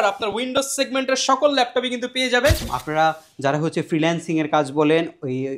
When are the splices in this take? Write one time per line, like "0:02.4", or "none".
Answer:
0:02.7